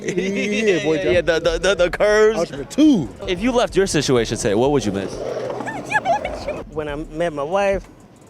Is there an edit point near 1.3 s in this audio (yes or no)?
no